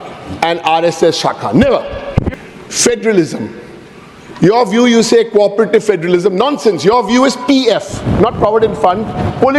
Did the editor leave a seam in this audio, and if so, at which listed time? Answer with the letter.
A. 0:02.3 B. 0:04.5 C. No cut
A